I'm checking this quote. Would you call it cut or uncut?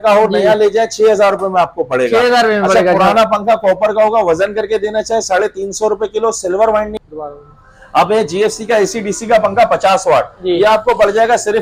uncut